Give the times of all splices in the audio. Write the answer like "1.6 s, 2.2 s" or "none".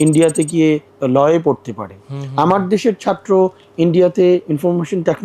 0.9 s